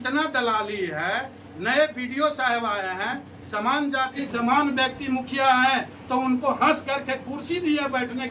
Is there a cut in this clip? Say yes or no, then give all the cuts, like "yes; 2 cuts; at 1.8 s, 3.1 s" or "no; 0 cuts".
yes; 1 cut; at 4.3 s